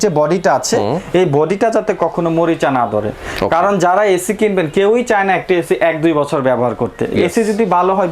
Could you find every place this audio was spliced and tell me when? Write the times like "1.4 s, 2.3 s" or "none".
none